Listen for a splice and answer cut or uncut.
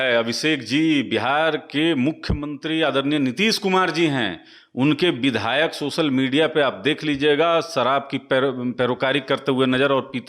uncut